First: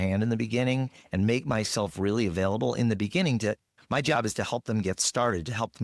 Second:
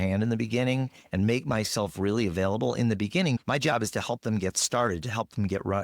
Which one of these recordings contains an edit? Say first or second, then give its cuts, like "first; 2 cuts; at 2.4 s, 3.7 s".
second; 1 cut; at 3.4 s